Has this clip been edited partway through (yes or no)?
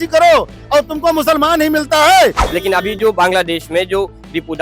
yes